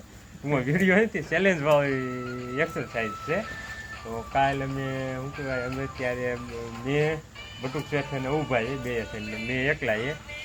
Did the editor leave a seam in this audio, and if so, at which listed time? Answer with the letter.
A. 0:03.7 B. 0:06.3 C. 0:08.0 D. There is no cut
D